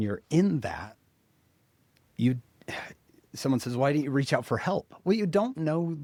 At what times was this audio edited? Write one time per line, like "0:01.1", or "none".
none